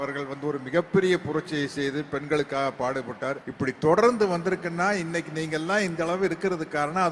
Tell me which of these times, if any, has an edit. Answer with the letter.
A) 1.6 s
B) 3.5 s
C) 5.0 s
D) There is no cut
B